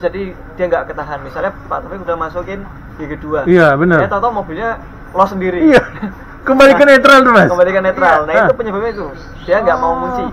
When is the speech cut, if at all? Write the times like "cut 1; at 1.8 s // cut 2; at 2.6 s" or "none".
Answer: none